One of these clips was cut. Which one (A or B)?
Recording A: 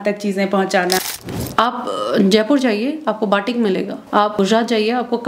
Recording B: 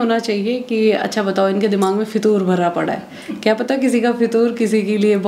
A